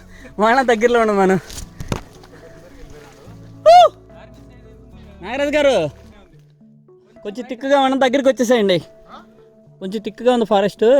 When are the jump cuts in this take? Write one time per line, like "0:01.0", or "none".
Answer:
none